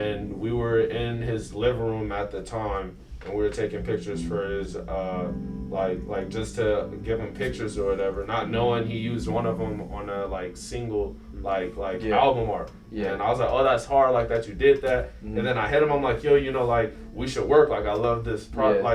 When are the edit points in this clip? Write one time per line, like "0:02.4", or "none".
none